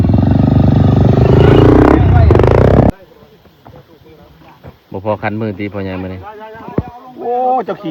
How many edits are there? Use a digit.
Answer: 1